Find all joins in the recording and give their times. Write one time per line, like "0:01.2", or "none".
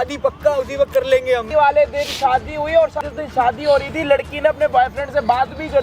0:01.4
0:03.1